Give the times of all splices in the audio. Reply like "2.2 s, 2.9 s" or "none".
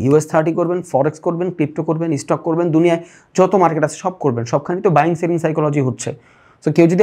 none